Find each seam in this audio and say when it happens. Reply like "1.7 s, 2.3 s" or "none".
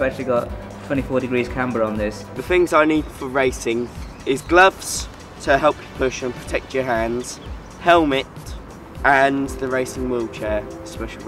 2.3 s